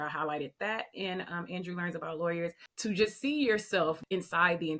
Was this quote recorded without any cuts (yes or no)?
no